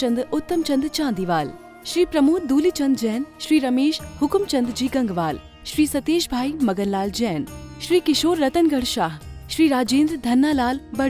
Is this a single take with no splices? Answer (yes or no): yes